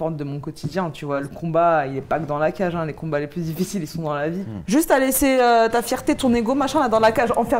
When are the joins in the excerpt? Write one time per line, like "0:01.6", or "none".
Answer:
0:01.3
0:04.5